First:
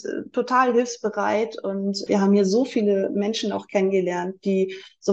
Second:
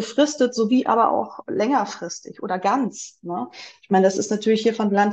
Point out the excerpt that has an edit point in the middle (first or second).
first